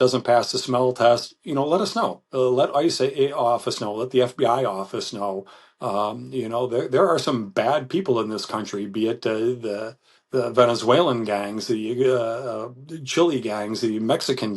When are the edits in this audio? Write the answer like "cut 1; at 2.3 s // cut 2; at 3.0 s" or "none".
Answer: none